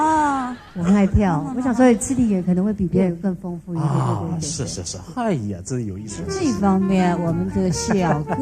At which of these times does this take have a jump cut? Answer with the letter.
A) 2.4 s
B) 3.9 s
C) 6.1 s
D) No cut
C